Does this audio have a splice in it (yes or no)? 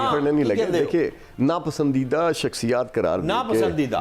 no